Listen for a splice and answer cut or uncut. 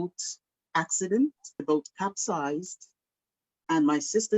cut